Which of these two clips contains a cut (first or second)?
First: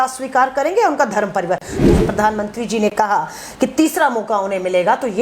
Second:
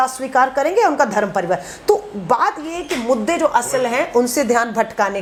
first